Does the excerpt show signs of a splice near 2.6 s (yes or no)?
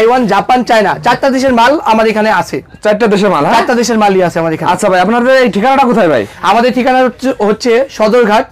no